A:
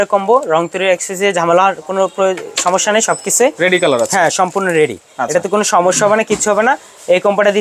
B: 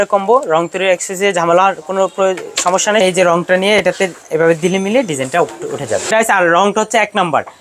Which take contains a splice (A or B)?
B